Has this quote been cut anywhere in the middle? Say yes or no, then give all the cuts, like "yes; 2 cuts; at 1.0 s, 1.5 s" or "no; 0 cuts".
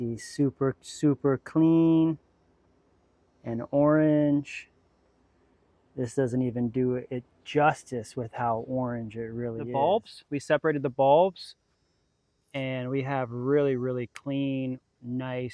yes; 1 cut; at 9.6 s